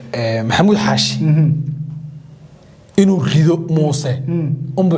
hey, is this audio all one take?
yes; 0 cuts

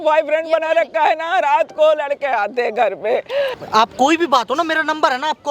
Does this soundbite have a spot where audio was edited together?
yes; 1 cut; at 3.6 s

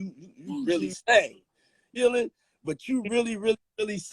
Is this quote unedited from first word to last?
no; 1 cut; at 1.8 s

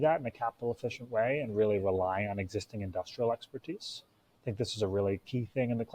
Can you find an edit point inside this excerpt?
no; 0 cuts

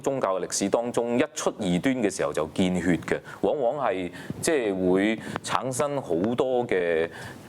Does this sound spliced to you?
no; 0 cuts

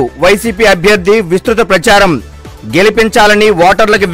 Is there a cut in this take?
no; 0 cuts

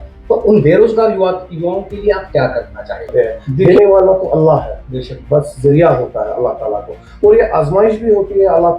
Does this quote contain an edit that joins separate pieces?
yes; 1 cut; at 3.1 s

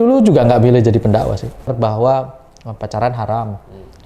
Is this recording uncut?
no; 1 cut; at 1.7 s

